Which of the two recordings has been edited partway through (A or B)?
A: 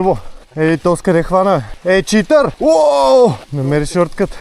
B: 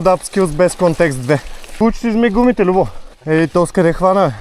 A